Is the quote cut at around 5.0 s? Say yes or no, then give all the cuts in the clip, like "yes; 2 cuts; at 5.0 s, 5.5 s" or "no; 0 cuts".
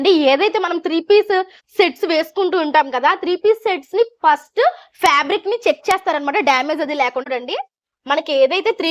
no; 1 cut; at 7.3 s